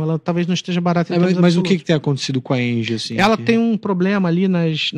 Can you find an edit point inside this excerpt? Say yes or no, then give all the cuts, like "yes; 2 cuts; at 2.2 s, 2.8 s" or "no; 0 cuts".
no; 0 cuts